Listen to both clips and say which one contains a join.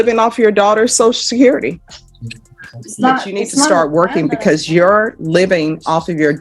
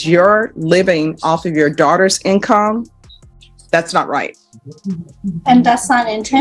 first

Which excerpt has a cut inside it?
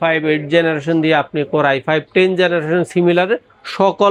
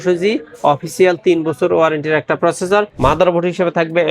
second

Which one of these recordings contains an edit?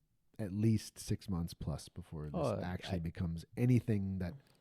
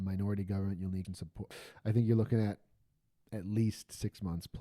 second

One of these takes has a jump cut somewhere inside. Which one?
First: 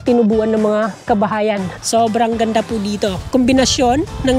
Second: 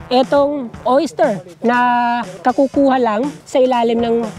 first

